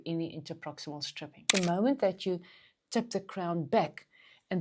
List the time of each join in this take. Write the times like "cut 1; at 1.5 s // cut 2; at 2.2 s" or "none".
cut 1; at 1.5 s